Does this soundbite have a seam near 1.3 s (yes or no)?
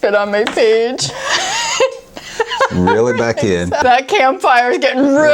no